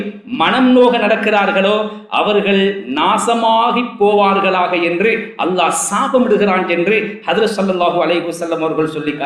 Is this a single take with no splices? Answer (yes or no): yes